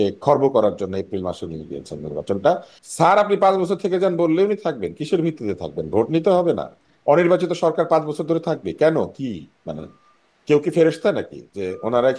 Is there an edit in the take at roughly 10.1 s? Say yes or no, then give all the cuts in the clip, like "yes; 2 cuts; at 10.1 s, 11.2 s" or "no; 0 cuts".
no; 1 cut; at 2.7 s